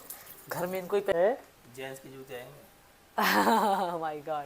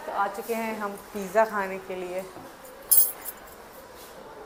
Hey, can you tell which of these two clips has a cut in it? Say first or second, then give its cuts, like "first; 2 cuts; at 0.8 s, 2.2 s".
first; 1 cut; at 1.1 s